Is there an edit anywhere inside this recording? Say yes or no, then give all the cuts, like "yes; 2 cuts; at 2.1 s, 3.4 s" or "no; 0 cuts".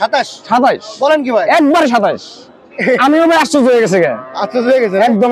no; 0 cuts